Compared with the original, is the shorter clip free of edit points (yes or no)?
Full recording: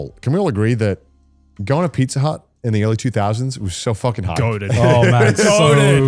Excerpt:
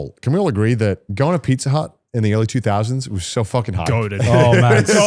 no